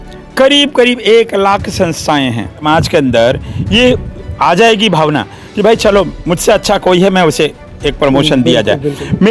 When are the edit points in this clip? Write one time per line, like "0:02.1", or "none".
0:02.6